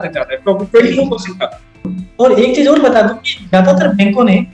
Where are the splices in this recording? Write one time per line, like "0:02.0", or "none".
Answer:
0:01.9